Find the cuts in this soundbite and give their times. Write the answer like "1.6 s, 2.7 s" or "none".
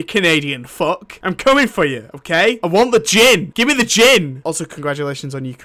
1.1 s, 2.6 s, 3.5 s, 4.4 s